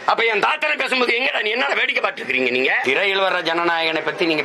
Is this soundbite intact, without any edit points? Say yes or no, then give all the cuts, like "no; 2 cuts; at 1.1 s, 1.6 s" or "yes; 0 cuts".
no; 1 cut; at 2.8 s